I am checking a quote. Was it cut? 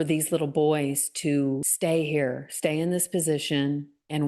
no; 0 cuts

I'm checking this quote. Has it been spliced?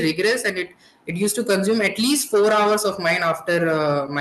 no; 0 cuts

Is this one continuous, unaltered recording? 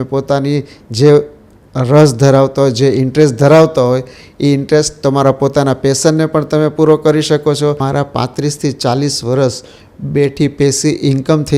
no; 1 cut; at 7.8 s

